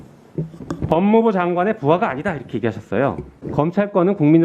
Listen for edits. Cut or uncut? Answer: cut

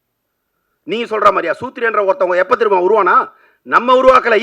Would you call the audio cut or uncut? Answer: uncut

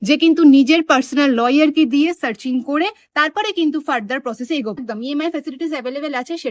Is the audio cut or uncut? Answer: cut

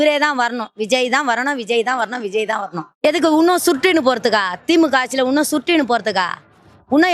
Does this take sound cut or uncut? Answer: cut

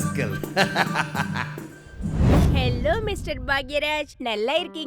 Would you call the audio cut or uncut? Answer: uncut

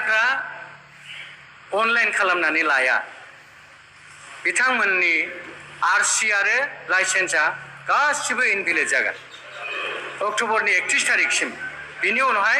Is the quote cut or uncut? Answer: cut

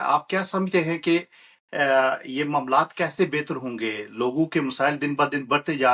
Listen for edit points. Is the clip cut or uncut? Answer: uncut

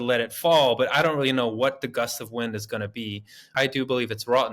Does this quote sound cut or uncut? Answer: cut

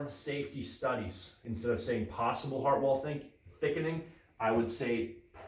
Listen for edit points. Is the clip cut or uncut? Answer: cut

